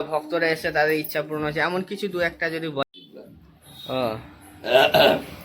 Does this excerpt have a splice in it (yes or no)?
yes